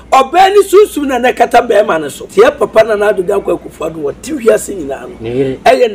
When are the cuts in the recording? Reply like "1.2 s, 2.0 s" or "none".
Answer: 2.2 s

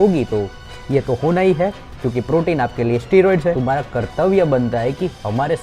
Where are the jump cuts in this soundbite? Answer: 3.6 s

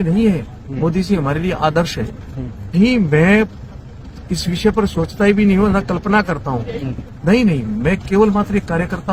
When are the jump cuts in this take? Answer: 2.6 s, 7.2 s

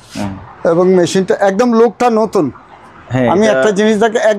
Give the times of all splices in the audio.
none

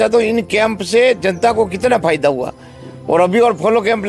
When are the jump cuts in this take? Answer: none

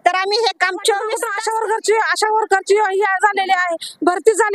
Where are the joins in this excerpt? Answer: 1.3 s

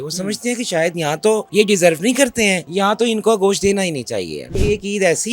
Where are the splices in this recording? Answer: 1.5 s, 2.6 s, 4.5 s

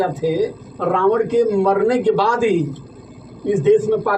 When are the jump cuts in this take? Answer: none

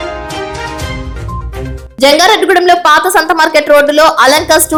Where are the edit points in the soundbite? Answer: none

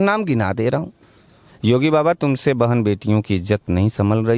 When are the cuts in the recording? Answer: 1.4 s

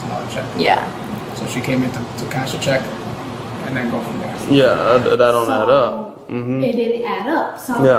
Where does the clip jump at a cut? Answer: 4.4 s

